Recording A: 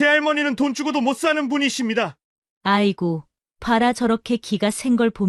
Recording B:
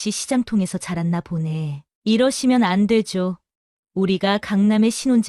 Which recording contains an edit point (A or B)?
B